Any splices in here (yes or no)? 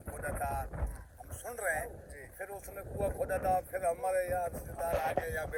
no